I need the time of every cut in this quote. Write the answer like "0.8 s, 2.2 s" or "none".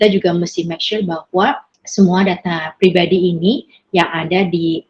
1.7 s